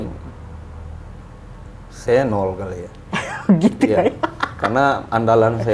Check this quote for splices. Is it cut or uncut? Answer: uncut